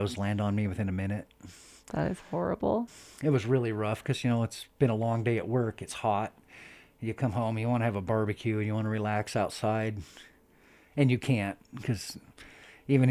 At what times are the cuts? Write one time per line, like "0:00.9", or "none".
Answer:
none